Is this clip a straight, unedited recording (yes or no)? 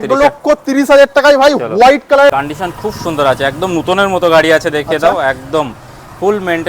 no